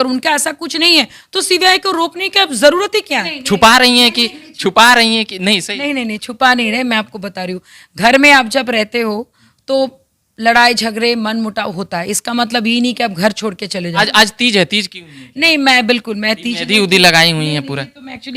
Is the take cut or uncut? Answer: cut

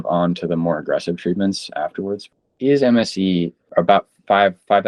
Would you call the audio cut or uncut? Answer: cut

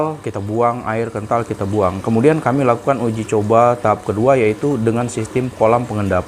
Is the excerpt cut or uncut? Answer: uncut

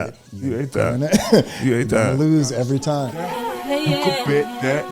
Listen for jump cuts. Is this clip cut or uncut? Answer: cut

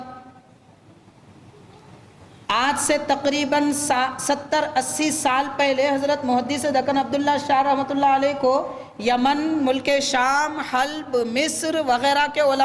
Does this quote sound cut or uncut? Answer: uncut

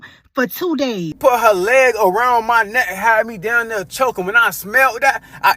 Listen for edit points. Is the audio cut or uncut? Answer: cut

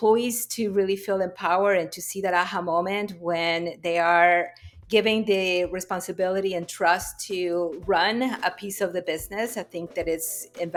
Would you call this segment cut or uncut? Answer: uncut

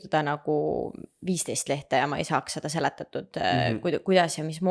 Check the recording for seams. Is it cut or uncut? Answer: uncut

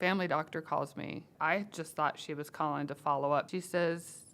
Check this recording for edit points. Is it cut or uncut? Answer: cut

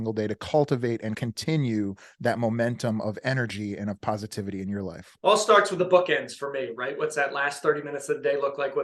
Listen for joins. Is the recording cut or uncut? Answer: cut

